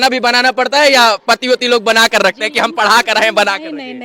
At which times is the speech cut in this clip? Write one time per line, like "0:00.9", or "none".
none

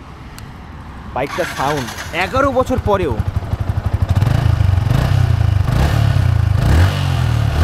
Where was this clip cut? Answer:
none

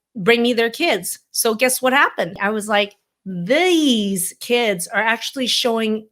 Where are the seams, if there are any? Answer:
0:02.4

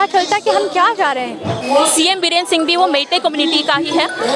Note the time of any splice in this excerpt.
0:01.6

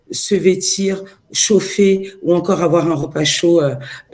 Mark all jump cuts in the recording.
none

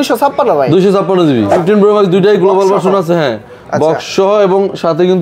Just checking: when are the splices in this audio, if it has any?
0:01.6

